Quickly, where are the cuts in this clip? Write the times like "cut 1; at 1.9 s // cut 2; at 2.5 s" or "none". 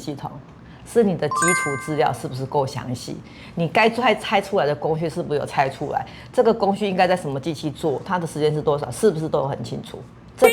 none